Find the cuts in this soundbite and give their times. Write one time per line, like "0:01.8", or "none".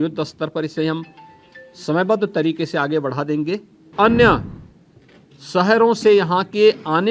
0:03.9